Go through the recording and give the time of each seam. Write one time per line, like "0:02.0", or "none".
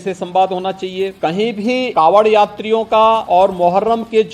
0:01.1
0:01.9
0:03.2